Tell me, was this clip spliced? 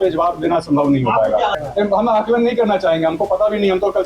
yes; 1 cut; at 1.6 s

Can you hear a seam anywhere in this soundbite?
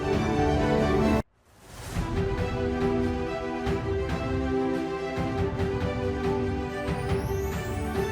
yes; 1 cut; at 1.2 s

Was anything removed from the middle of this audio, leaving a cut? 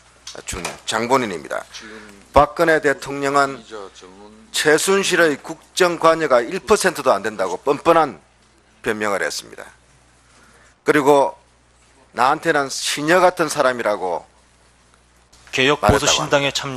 yes; 1 cut; at 12.8 s

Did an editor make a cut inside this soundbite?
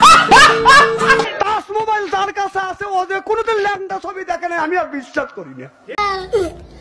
yes; 2 cuts; at 1.3 s, 5.9 s

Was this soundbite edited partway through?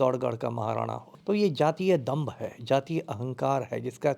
yes; 1 cut; at 1.1 s

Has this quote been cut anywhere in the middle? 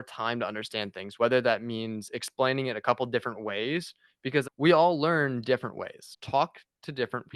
no; 0 cuts

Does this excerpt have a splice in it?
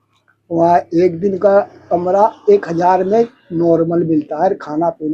no; 0 cuts

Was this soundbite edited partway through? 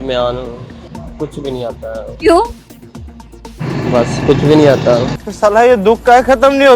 no; 0 cuts

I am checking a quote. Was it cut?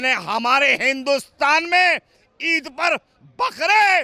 no; 0 cuts

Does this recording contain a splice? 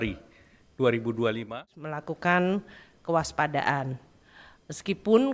yes; 1 cut; at 1.8 s

